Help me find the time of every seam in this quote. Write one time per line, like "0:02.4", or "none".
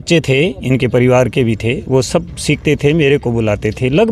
none

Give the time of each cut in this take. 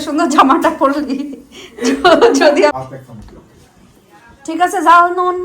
0:02.7

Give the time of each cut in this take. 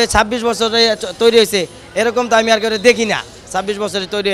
none

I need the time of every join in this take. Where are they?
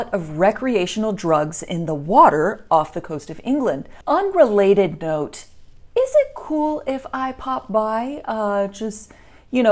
0:03.9

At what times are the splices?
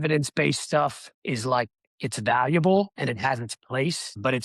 0:01.1
0:01.8

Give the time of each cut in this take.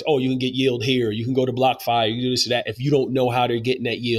none

